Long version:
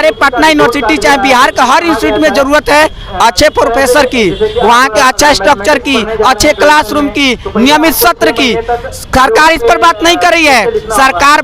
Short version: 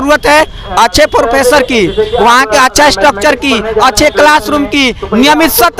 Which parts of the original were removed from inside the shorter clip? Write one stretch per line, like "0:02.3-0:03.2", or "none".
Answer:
none